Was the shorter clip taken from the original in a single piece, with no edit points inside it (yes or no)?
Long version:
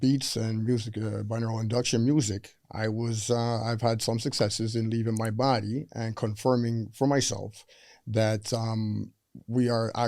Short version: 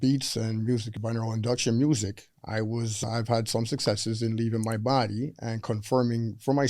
no